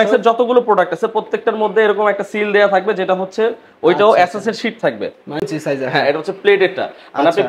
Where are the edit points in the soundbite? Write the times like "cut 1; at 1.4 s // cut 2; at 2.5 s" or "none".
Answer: cut 1; at 5.4 s